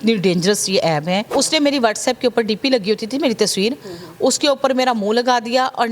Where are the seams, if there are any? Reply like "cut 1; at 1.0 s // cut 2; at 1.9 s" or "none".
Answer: cut 1; at 1.3 s